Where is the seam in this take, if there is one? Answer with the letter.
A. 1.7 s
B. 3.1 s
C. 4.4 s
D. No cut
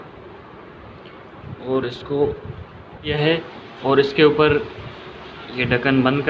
B